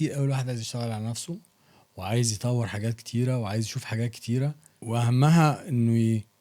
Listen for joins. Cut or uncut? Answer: cut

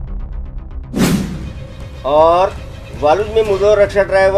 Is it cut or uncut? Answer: uncut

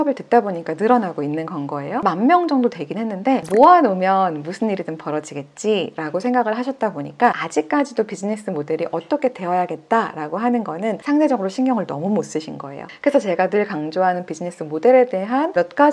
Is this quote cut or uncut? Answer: uncut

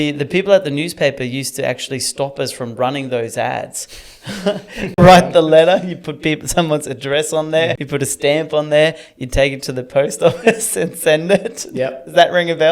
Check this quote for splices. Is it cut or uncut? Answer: cut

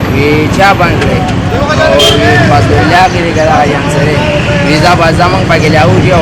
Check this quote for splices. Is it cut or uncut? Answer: uncut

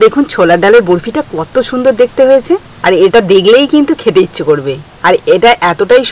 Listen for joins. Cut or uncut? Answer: uncut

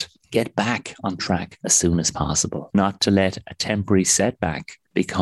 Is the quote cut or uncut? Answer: cut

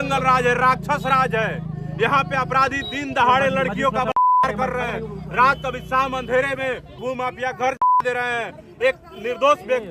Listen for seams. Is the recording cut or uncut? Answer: cut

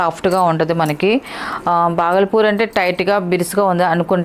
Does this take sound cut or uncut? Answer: uncut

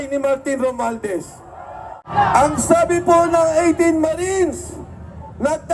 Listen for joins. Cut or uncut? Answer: cut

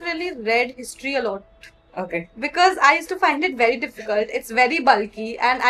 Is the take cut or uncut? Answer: uncut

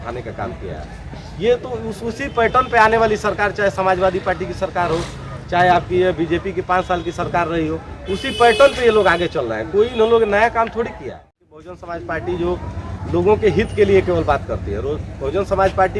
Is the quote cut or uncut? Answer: cut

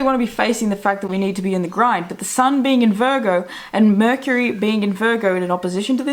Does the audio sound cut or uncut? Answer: uncut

